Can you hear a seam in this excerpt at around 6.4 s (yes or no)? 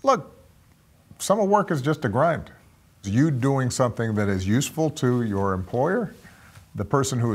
no